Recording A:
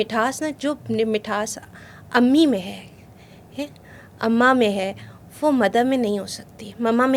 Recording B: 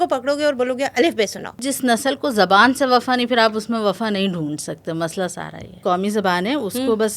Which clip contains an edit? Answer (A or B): B